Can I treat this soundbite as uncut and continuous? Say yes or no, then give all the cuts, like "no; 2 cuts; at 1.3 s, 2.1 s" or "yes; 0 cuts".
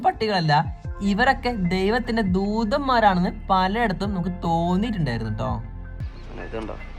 no; 1 cut; at 5.9 s